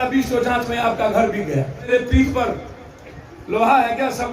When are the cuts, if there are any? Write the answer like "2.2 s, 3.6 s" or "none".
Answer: 1.8 s